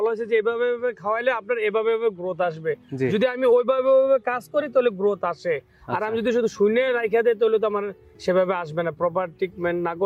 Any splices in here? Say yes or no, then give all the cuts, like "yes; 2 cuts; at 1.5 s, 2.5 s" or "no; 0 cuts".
no; 0 cuts